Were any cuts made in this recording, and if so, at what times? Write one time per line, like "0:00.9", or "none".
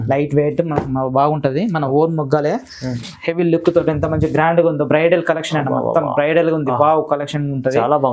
0:03.0